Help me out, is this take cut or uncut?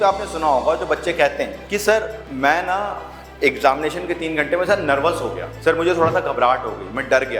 cut